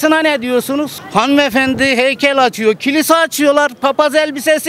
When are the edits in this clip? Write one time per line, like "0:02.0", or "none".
none